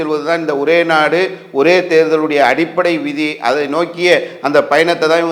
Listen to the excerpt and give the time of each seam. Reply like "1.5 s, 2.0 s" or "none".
none